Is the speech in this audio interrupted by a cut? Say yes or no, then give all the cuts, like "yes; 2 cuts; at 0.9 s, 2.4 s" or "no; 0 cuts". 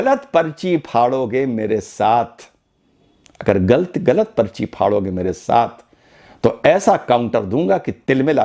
no; 0 cuts